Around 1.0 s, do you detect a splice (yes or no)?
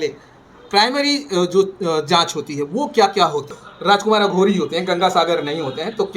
no